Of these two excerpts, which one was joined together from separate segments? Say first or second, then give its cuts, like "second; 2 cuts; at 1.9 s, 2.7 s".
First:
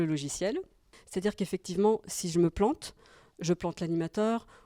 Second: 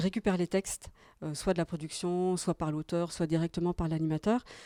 first; 1 cut; at 1.0 s